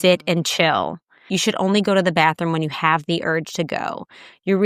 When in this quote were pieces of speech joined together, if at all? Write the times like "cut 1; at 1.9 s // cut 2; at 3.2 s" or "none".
cut 1; at 1.3 s